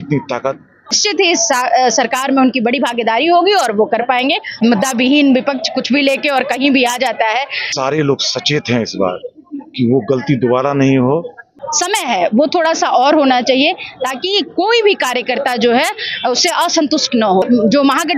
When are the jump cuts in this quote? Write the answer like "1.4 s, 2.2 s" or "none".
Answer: 1.0 s, 4.6 s, 7.6 s, 11.5 s, 17.4 s